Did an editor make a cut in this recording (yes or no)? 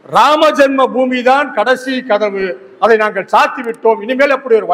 no